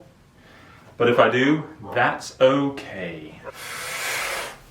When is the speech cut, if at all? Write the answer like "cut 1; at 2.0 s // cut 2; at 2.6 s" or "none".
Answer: cut 1; at 3.5 s